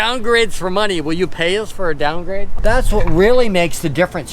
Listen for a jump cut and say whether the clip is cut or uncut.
cut